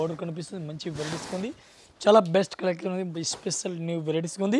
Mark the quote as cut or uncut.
uncut